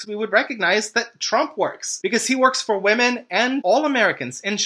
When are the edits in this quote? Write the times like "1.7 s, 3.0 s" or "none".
3.6 s